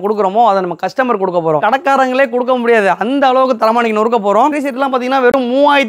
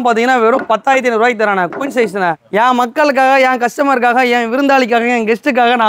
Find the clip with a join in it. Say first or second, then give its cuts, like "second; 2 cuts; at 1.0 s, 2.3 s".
first; 2 cuts; at 1.6 s, 4.5 s